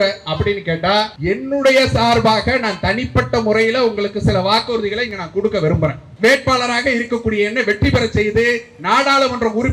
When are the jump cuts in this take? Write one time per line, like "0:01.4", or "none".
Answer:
0:01.1
0:06.1

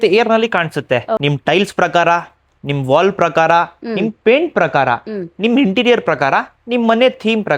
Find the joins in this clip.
0:01.2

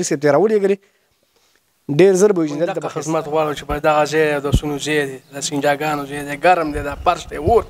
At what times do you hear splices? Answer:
0:02.9

